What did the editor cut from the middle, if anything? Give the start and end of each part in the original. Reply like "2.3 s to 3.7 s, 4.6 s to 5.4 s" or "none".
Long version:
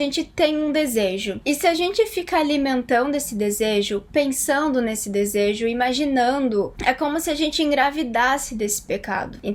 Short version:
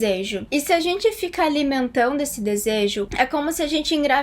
4.0 s to 6.8 s